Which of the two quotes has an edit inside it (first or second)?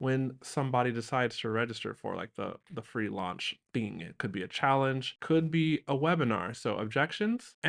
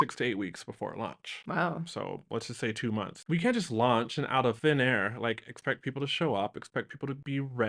second